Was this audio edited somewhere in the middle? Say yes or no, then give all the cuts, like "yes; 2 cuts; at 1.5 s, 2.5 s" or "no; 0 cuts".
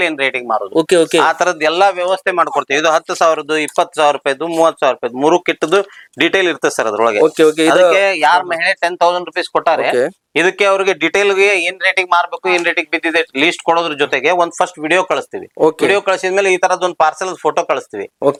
no; 0 cuts